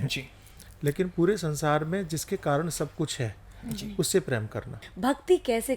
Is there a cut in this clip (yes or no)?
yes